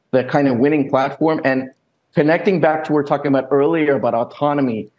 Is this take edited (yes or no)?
yes